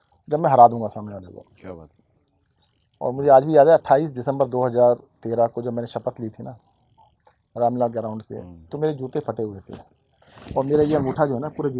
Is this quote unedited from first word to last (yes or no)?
yes